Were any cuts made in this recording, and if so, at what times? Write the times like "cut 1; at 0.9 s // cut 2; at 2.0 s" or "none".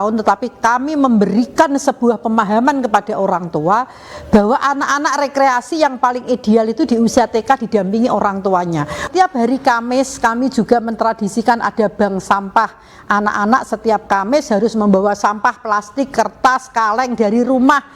cut 1; at 9.1 s